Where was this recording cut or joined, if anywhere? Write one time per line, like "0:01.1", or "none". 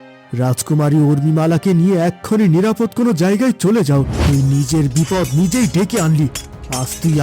0:04.2